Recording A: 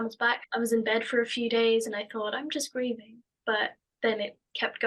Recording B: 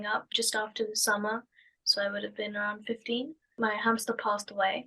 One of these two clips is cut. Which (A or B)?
B